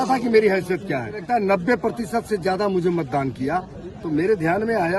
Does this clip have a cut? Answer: yes; 1 cut; at 1.2 s

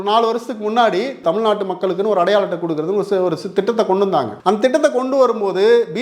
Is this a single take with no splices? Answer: no; 2 cuts; at 1.2 s, 4.3 s

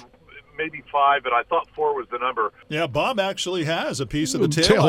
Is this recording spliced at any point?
yes; 1 cut; at 2.6 s

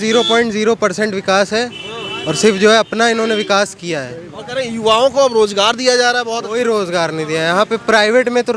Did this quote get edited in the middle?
no; 0 cuts

